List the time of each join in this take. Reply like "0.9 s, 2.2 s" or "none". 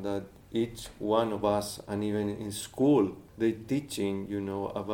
3.2 s